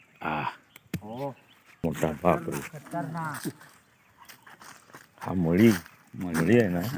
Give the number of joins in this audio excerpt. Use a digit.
1